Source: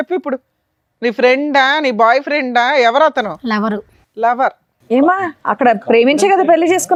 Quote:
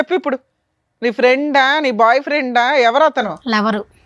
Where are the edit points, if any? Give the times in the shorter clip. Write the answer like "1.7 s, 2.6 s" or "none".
none